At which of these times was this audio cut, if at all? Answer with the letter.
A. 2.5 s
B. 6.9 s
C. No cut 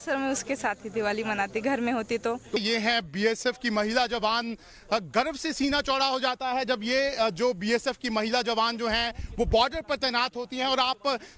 A